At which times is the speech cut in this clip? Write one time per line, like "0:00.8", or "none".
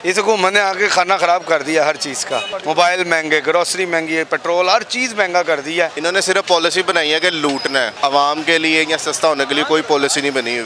0:02.5
0:06.0
0:07.9